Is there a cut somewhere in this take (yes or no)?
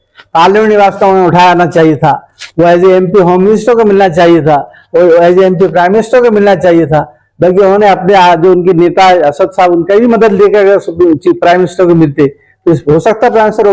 no